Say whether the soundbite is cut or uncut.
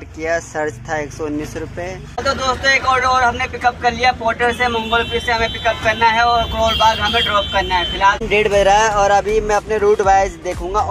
cut